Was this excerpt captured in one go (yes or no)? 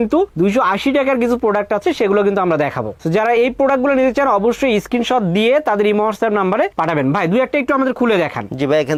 yes